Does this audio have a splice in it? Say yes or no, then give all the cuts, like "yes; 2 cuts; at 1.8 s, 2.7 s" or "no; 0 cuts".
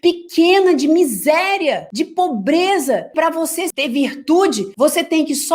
yes; 1 cut; at 3.3 s